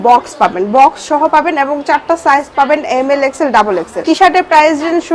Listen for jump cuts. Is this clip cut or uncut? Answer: cut